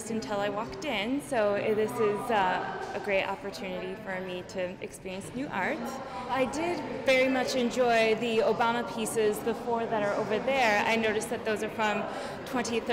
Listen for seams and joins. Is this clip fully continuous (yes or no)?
no